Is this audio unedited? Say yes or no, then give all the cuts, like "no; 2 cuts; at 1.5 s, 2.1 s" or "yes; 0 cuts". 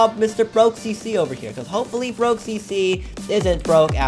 yes; 0 cuts